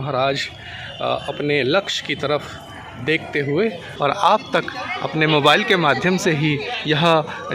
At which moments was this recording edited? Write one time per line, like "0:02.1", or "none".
0:03.9